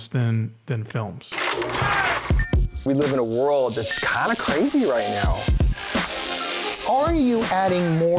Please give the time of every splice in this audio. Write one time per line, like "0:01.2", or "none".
0:01.3